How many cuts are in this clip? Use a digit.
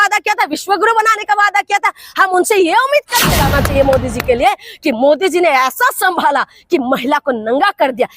1